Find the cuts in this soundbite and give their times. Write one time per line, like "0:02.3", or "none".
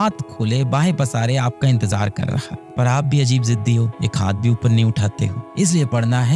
0:05.4